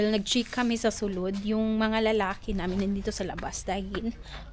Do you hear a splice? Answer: no; 0 cuts

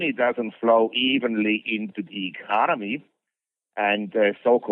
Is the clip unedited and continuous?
yes; 0 cuts

